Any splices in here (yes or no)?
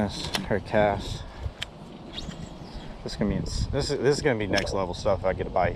no